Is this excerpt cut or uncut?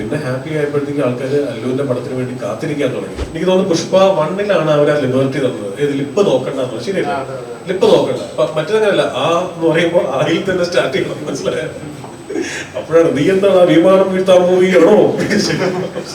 cut